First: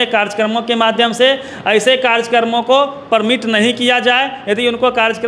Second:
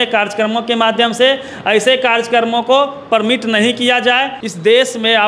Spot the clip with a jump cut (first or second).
second